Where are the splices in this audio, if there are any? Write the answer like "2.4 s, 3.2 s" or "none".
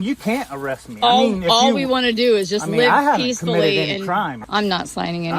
4.4 s

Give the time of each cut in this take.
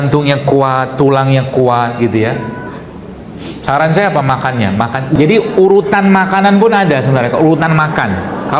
5.2 s

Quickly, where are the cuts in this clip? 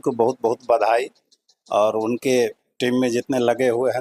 none

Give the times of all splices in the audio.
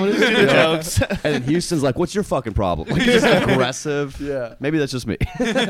none

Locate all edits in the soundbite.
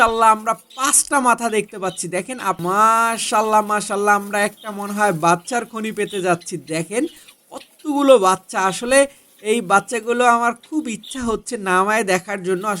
2.6 s

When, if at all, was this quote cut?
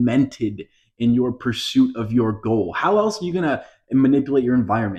none

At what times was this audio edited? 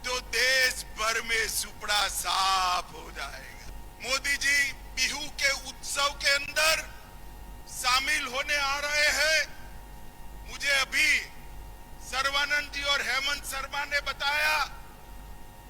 3.7 s

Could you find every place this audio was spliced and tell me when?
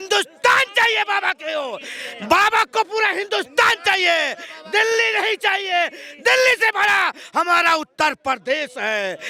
none

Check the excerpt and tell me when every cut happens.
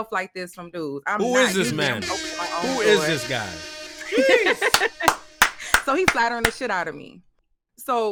none

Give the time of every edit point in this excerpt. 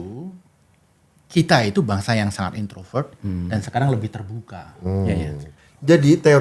5.5 s

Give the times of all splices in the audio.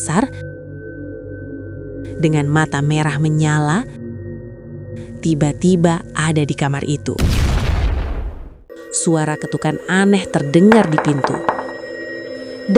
8.6 s

